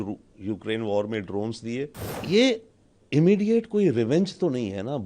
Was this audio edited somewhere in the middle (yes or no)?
yes